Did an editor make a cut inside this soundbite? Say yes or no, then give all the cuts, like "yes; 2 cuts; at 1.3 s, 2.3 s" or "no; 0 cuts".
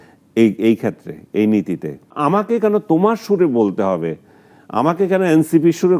yes; 1 cut; at 2.2 s